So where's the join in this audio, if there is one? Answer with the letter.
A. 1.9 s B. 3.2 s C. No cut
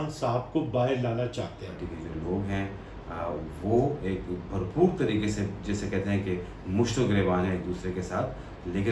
A